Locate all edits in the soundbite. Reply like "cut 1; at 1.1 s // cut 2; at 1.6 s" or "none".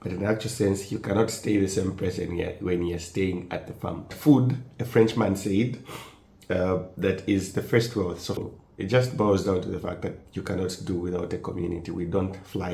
cut 1; at 4.1 s // cut 2; at 8.4 s